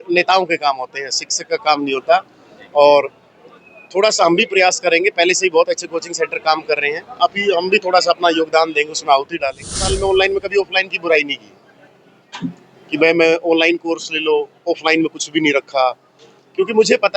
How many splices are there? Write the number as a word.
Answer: one